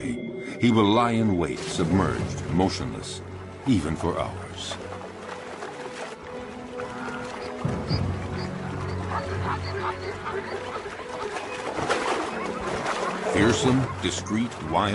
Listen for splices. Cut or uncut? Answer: cut